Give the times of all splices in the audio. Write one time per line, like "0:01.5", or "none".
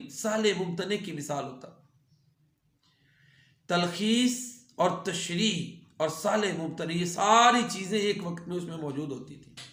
none